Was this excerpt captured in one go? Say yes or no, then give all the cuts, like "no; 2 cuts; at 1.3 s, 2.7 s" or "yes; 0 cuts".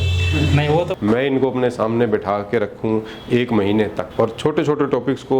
no; 2 cuts; at 0.9 s, 4.0 s